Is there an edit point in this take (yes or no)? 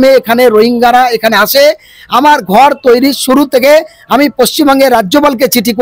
no